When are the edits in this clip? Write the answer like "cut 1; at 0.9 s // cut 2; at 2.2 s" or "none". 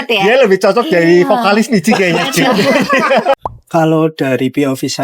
cut 1; at 3.4 s